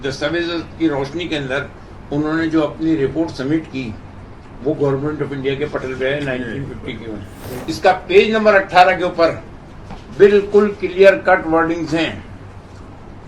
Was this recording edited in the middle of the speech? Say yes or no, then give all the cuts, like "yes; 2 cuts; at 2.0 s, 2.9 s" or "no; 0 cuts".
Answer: yes; 1 cut; at 7.5 s